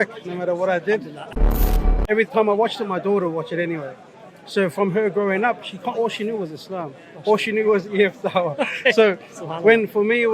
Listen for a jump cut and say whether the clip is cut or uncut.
cut